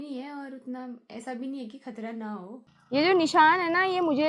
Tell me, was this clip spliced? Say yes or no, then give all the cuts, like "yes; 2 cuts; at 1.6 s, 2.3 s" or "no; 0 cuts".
yes; 1 cut; at 2.8 s